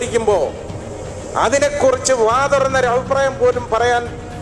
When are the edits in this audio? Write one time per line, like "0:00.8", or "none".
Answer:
none